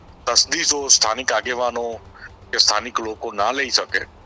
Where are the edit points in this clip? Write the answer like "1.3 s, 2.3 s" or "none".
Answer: none